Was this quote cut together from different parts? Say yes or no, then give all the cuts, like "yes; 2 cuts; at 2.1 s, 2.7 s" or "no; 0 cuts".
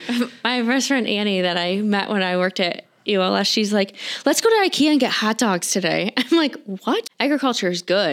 yes; 1 cut; at 7.0 s